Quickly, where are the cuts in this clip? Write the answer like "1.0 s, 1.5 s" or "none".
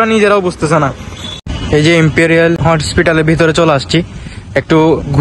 1.4 s, 2.6 s